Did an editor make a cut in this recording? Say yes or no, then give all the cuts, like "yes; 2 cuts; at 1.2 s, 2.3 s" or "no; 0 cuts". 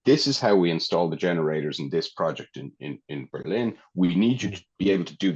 no; 0 cuts